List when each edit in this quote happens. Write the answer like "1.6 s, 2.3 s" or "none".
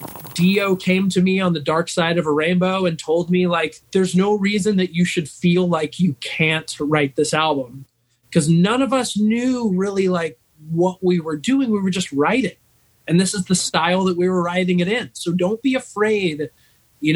3.8 s